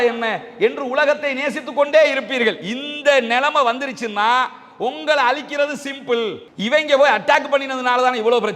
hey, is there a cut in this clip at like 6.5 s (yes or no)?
yes